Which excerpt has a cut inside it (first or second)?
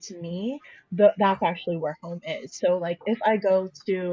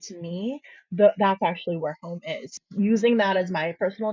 second